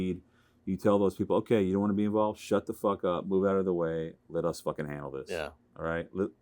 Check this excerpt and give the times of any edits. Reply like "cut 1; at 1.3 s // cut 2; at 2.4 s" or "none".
none